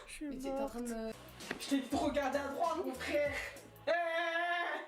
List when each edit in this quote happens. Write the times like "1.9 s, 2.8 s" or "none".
1.1 s